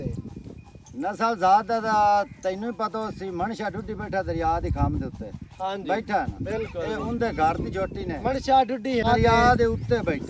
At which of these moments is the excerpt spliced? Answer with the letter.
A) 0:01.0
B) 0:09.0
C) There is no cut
B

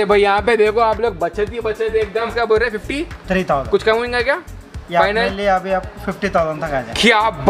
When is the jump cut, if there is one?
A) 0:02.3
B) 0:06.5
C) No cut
A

